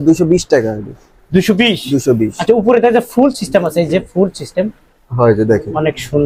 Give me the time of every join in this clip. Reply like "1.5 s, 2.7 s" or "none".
none